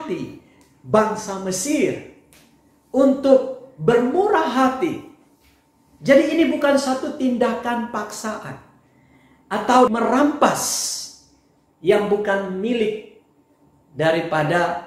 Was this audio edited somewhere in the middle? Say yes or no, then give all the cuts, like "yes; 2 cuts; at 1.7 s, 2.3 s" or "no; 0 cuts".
no; 0 cuts